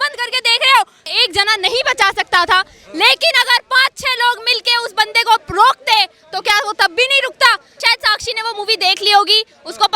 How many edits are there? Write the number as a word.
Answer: two